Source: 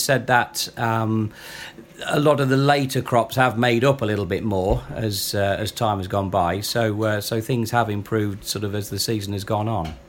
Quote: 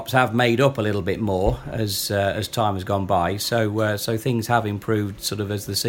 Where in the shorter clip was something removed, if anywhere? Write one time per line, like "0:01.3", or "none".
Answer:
none